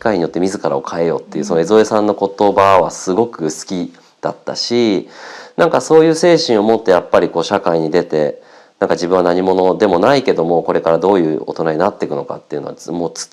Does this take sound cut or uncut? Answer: uncut